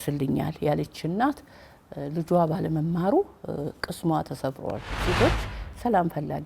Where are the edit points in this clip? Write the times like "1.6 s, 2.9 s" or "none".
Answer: 4.9 s